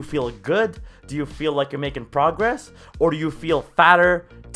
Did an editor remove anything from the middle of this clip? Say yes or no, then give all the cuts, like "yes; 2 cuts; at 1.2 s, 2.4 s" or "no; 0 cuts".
no; 0 cuts